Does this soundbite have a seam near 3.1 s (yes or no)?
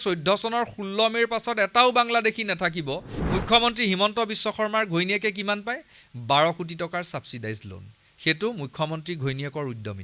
yes